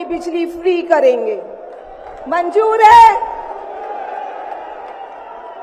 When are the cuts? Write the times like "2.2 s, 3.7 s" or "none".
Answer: none